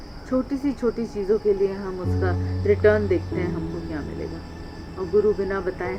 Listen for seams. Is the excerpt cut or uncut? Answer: uncut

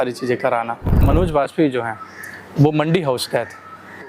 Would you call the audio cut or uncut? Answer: cut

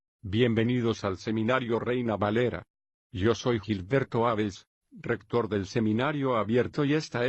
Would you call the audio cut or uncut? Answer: uncut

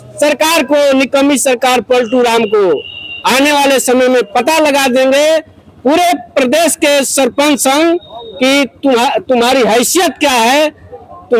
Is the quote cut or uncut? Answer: uncut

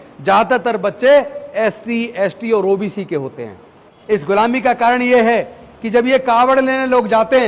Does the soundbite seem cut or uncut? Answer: cut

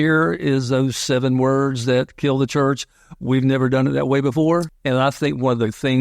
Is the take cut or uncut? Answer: cut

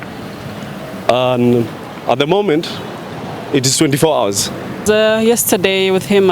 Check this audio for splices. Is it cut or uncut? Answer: cut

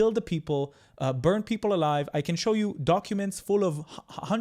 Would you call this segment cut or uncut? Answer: uncut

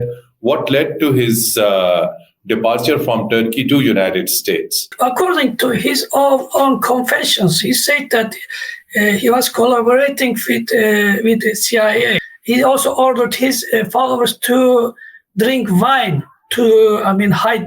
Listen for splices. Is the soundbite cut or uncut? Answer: cut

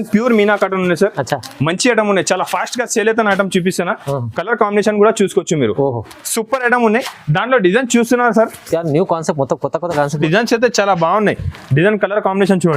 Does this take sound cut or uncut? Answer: cut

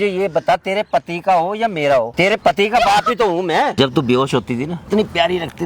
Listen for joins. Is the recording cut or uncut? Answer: cut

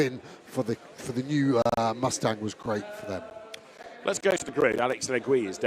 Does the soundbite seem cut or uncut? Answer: cut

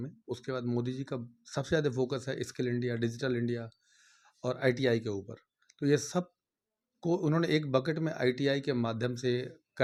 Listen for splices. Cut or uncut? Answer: uncut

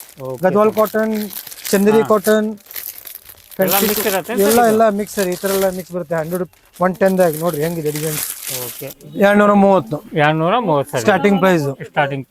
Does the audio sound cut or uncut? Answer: cut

